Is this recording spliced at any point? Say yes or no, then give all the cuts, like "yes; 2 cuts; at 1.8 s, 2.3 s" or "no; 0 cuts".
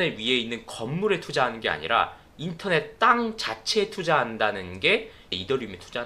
no; 0 cuts